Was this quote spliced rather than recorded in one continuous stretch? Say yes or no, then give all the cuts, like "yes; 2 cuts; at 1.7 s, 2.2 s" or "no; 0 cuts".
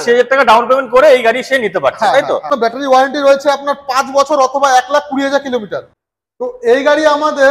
yes; 2 cuts; at 2.5 s, 6.3 s